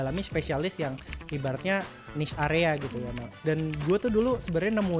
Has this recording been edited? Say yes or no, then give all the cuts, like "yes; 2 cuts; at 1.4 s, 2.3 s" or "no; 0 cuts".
yes; 1 cut; at 3.2 s